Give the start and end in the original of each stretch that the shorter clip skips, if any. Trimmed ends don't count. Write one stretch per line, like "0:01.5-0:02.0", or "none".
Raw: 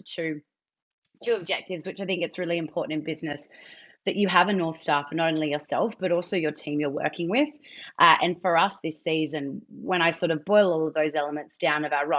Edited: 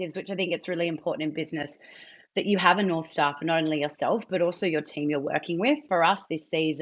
0:07.5-0:08.4